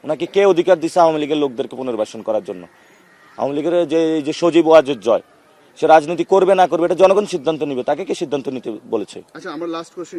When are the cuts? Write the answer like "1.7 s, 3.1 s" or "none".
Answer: none

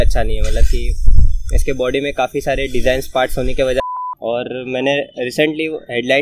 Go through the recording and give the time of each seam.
3.8 s

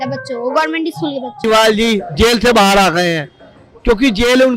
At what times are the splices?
1.4 s

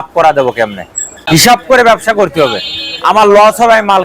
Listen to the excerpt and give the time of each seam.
1.4 s

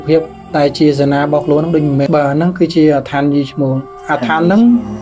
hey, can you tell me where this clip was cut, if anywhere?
2.1 s

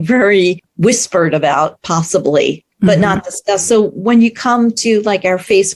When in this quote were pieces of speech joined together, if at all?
2.7 s

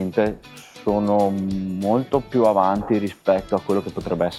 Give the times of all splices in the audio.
none

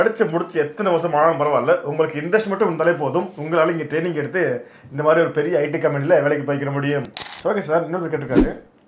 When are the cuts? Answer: 7.1 s

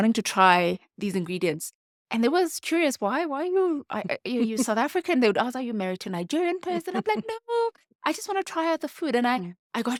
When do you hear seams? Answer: none

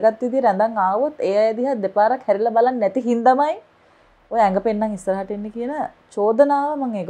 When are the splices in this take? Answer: none

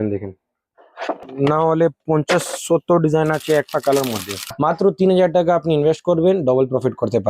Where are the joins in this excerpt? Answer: 1.2 s, 4.6 s

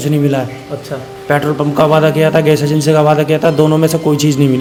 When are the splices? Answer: none

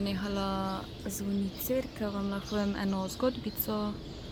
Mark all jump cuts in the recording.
none

